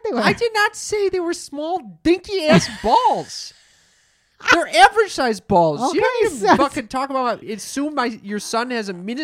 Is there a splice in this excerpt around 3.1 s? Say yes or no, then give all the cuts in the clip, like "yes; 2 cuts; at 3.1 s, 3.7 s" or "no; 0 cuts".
no; 1 cut; at 7.5 s